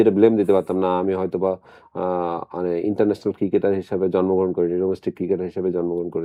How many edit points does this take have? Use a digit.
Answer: 0